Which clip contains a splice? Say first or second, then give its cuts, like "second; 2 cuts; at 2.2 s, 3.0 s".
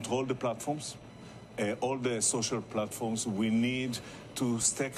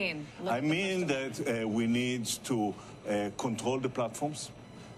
first; 1 cut; at 2.4 s